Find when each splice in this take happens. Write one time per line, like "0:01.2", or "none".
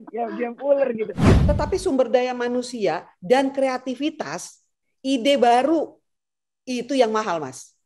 0:01.3